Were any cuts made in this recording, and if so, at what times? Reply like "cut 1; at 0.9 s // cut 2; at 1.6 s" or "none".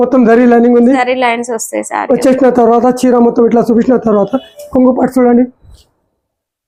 none

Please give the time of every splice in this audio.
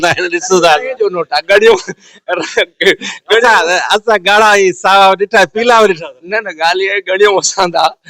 none

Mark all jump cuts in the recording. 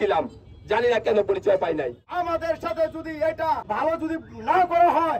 cut 1; at 2.0 s // cut 2; at 3.6 s

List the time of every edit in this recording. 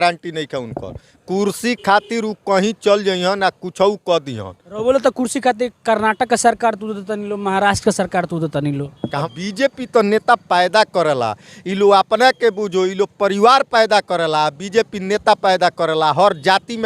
cut 1; at 9.1 s

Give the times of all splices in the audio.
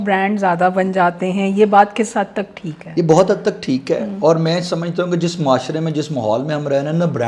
none

